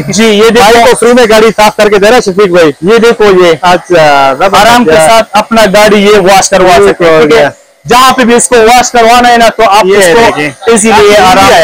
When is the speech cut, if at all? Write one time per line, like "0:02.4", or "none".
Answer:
none